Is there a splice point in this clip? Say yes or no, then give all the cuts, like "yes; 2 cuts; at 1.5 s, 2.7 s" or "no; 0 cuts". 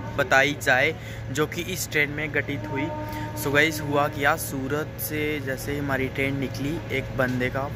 no; 0 cuts